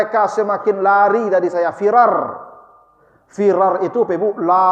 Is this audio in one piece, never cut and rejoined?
yes; 0 cuts

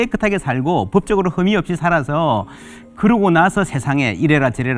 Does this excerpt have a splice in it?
no; 0 cuts

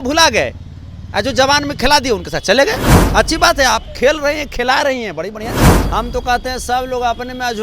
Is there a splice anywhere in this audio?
yes; 2 cuts; at 2.9 s, 5.7 s

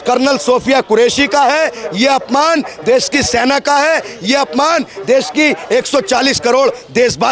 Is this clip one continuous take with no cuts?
yes; 0 cuts

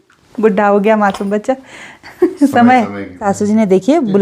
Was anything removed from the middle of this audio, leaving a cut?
yes; 1 cut; at 3.2 s

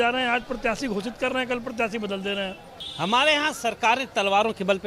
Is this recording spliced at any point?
yes; 1 cut; at 2.6 s

